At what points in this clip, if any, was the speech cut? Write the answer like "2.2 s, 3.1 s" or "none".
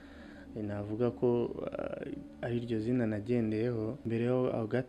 4.0 s